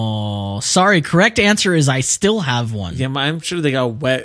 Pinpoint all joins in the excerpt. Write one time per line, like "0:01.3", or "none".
0:02.9